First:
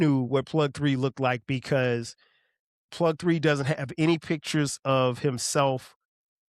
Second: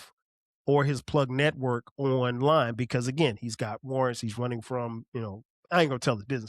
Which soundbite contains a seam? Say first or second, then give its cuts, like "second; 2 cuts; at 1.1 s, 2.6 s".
second; 1 cut; at 5.5 s